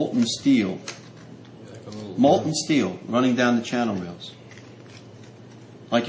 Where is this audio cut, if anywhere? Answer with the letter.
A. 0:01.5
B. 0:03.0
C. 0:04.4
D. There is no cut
A